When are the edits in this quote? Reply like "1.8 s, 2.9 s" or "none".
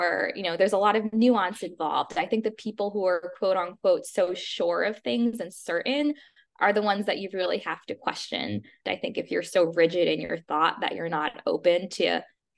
8.8 s